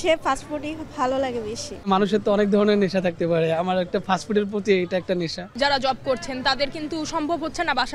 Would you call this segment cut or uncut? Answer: cut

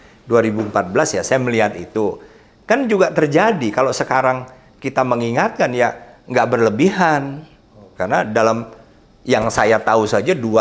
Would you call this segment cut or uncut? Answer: uncut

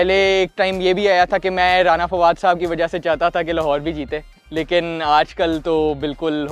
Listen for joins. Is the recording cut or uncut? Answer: uncut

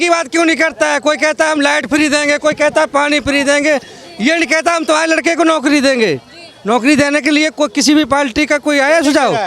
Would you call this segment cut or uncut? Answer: uncut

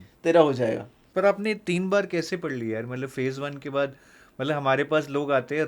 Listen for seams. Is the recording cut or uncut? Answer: cut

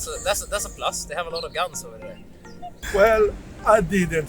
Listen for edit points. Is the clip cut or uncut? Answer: cut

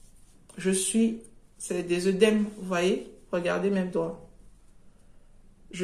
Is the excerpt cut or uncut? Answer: uncut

